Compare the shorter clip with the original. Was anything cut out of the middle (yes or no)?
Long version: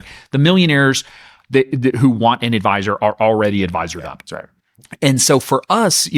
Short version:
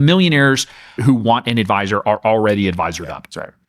yes